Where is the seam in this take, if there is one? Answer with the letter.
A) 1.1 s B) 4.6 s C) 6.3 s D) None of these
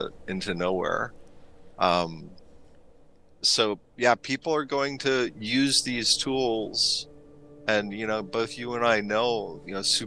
D